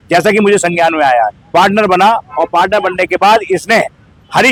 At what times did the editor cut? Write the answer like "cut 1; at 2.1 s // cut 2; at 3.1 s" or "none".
none

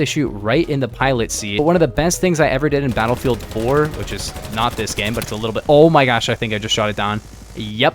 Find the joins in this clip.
none

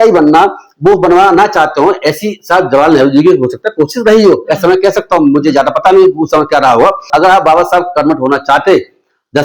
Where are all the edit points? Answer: cut 1; at 7.1 s

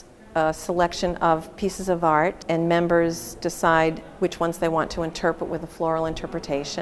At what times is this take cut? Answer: cut 1; at 2.4 s

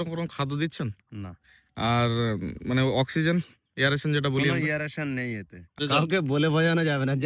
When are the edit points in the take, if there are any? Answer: cut 1; at 5.6 s

